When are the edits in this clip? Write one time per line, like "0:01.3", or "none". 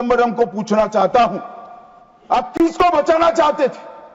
none